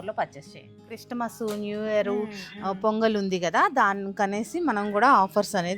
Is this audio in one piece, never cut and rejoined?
no; 1 cut; at 1.0 s

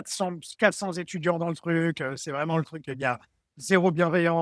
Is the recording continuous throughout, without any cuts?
yes; 0 cuts

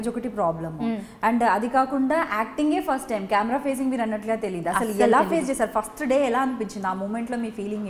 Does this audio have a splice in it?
no; 0 cuts

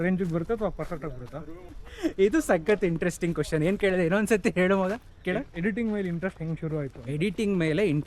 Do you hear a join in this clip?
yes; 1 cut; at 1.8 s

